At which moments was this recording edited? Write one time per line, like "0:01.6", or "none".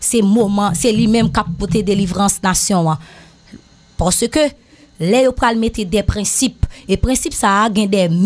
none

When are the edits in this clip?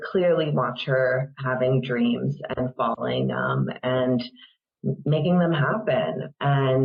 none

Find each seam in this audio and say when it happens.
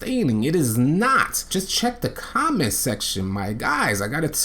0:01.4

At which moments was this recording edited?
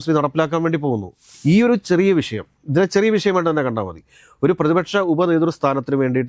0:01.3

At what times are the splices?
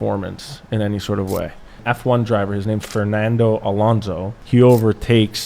0:01.8
0:02.9
0:04.3

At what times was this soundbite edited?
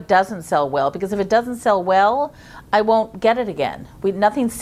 none

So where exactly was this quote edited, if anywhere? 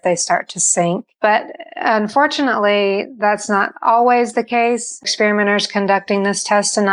0:01.1
0:05.1

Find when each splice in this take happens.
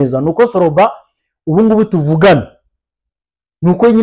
none

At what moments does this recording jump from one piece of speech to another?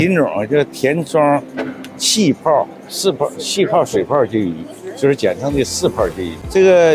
none

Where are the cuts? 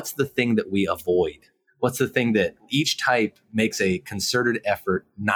none

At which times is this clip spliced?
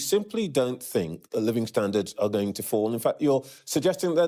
none

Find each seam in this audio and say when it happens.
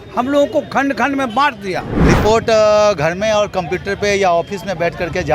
0:02.0

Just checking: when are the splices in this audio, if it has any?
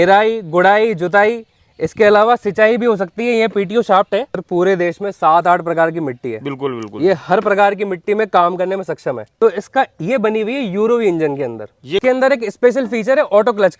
0:04.4
0:09.3
0:12.0

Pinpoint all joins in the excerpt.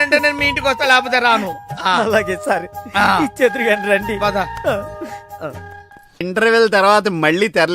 0:06.2

